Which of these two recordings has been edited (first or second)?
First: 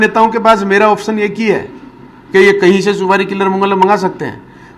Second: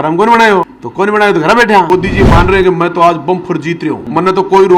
second